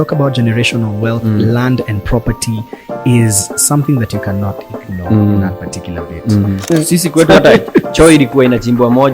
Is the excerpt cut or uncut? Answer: cut